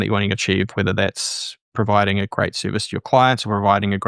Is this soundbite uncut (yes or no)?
yes